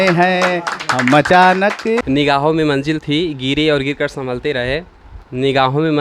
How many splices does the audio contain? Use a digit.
1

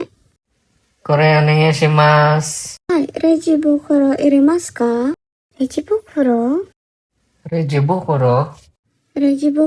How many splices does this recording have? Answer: 1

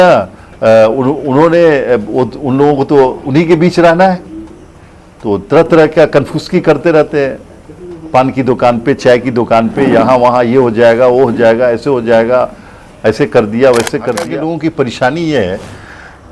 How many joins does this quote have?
1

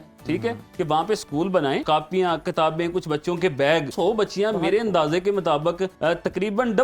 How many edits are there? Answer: 3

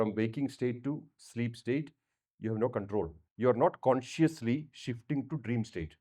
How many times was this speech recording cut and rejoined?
1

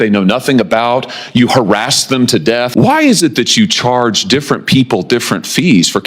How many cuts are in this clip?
1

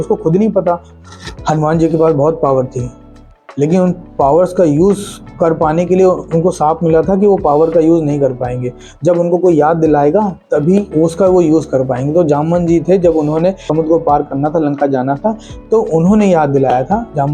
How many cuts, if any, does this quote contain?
4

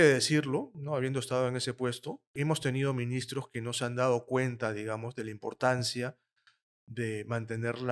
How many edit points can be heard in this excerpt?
1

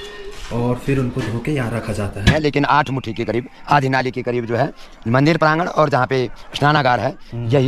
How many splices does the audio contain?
1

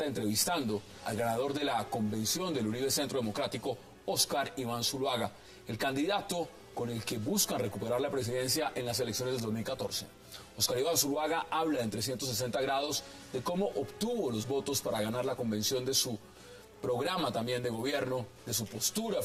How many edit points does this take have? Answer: 0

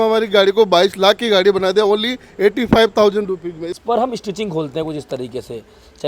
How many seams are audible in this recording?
1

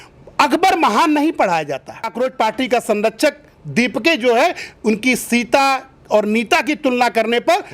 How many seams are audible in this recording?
1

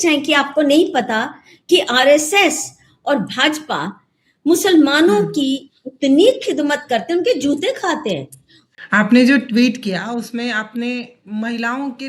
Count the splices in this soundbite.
1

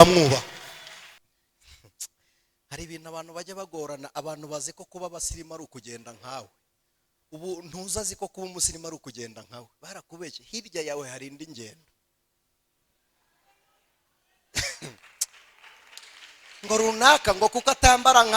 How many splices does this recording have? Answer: 1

